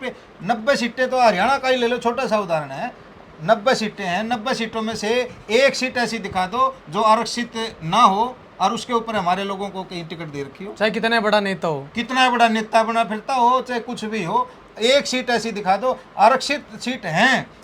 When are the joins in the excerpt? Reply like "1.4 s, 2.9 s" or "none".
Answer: none